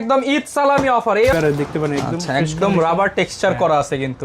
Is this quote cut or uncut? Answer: cut